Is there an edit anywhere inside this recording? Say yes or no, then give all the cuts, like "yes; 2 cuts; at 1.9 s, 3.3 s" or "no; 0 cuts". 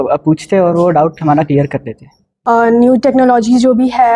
yes; 1 cut; at 2.5 s